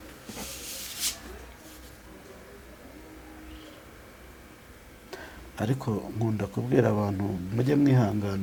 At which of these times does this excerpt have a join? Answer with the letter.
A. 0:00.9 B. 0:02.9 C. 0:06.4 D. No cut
D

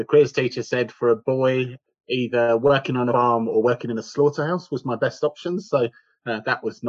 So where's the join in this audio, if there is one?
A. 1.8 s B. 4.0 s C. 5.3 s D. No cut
A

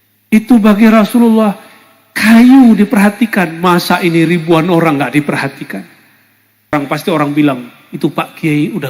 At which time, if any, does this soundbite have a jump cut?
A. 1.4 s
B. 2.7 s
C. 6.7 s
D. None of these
C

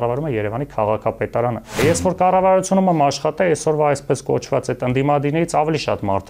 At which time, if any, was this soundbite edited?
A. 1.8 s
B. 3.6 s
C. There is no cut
A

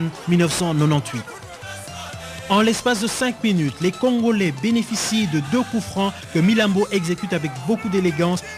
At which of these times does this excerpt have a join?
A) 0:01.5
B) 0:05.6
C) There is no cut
B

